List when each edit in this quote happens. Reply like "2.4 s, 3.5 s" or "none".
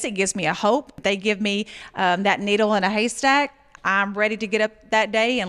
1.0 s